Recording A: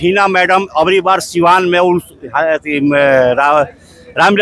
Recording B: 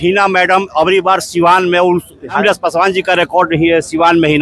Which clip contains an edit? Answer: B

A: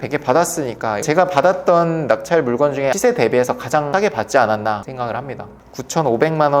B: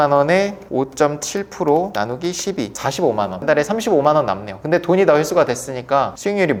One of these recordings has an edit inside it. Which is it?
A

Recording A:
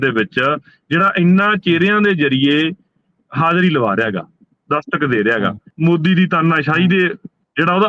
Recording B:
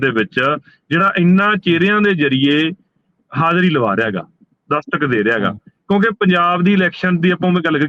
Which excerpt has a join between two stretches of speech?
A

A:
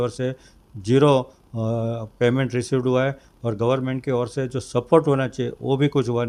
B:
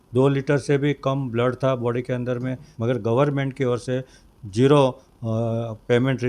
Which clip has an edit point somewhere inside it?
B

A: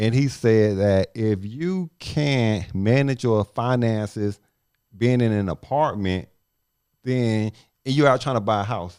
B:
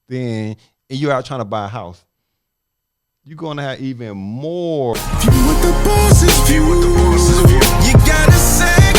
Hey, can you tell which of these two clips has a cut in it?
B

